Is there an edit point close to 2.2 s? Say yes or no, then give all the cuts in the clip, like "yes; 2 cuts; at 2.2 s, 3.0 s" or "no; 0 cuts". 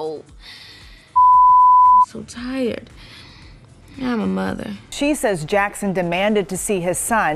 no; 1 cut; at 4.8 s